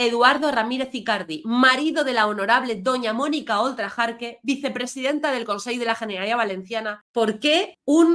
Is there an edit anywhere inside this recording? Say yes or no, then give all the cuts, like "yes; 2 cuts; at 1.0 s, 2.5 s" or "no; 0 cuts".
yes; 1 cut; at 7.0 s